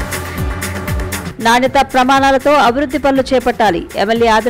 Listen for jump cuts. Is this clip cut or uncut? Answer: uncut